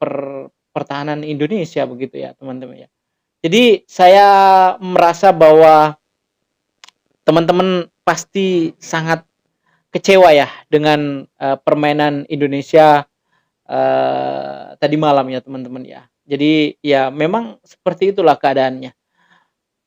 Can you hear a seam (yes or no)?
no